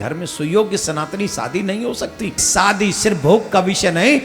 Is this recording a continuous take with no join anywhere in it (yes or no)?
no